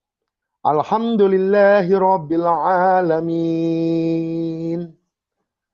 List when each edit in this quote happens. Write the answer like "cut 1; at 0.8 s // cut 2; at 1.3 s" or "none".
none